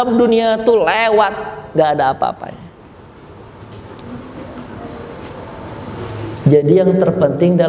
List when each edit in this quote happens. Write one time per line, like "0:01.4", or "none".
none

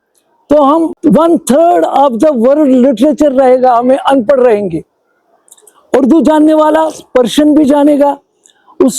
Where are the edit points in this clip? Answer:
0:00.9

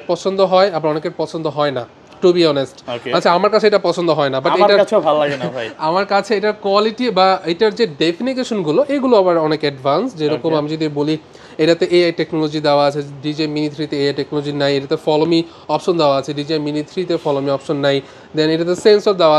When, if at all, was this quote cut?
none

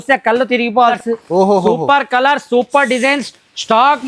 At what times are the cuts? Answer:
0:00.9

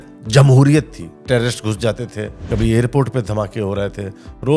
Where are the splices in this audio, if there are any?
0:01.2
0:02.3

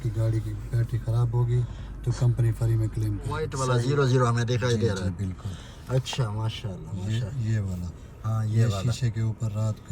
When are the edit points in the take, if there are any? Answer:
0:03.6

